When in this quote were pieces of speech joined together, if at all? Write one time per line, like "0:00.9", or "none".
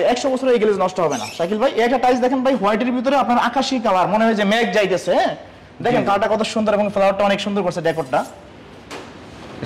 none

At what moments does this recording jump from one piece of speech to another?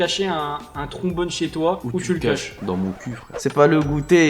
0:01.8
0:03.4

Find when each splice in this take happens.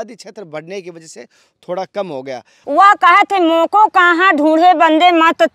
0:02.5

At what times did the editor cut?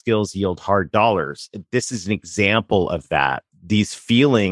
0:03.4

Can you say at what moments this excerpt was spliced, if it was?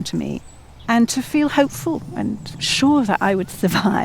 0:02.6

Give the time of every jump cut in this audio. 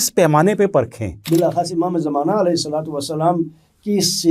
0:01.2

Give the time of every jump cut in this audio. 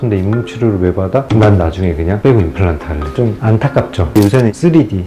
0:03.1
0:04.2

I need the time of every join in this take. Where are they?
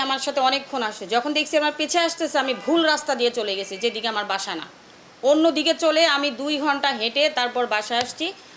none

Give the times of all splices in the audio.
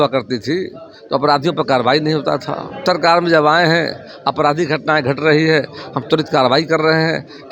0:02.8

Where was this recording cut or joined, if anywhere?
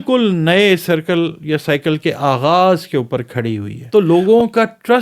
0:04.1

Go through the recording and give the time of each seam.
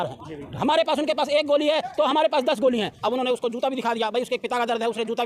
0:02.9

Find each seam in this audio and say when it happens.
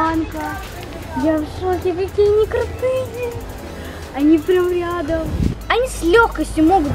0:05.6

